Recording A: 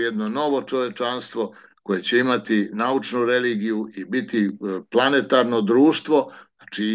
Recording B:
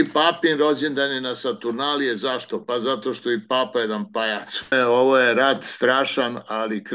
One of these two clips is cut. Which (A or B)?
B